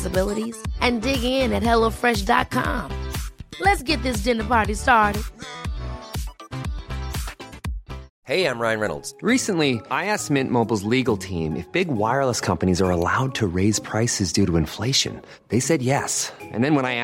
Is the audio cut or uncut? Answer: cut